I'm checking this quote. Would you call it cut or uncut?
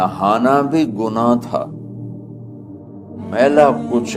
uncut